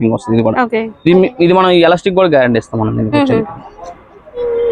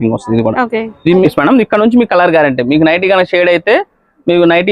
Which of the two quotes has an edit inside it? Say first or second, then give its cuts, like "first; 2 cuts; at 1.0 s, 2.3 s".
second; 1 cut; at 1.3 s